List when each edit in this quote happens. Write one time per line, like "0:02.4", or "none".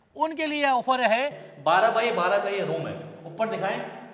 0:01.4

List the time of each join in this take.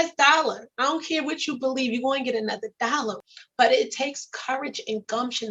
none

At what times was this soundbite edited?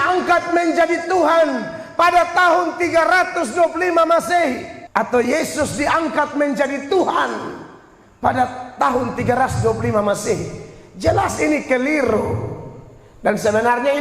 0:04.7

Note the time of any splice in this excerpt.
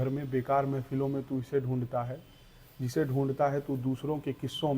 none

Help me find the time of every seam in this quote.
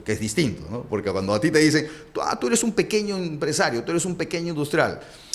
none

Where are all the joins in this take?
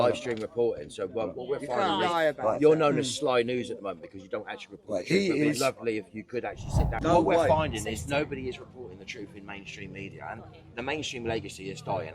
0:07.0

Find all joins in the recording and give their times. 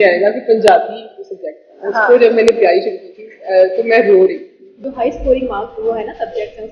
0:04.8

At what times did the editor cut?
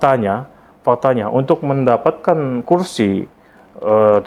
none

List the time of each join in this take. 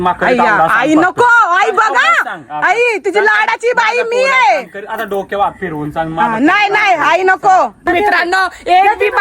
0:07.8

